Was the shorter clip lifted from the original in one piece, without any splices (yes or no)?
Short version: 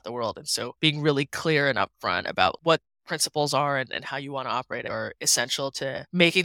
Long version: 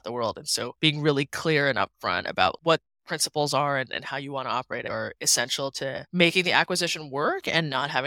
yes